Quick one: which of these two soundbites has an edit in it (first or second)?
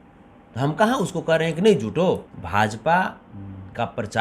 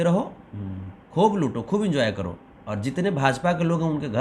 first